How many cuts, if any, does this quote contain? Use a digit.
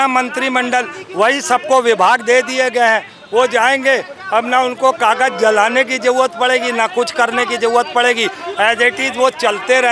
0